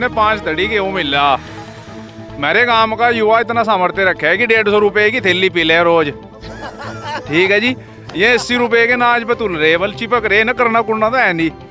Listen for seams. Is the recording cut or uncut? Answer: uncut